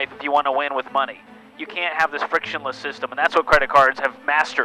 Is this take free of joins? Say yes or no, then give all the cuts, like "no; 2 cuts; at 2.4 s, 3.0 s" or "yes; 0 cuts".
yes; 0 cuts